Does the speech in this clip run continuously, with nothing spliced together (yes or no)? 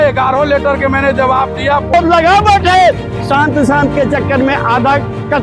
no